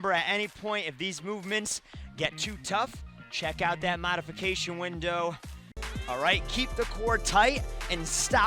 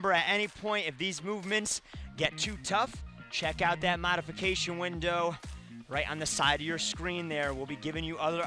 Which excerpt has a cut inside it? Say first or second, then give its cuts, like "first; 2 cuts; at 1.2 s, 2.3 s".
first; 1 cut; at 5.7 s